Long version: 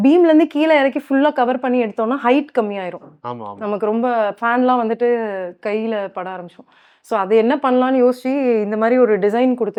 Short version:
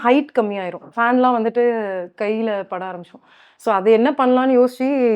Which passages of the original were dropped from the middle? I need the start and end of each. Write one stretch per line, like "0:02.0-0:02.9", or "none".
0:03.1-0:04.4